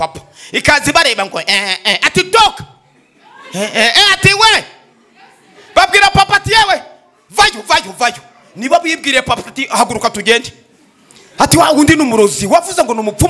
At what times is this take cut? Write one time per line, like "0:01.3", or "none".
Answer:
none